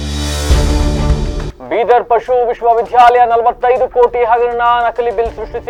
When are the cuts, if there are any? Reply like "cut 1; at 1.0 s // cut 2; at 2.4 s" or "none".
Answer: none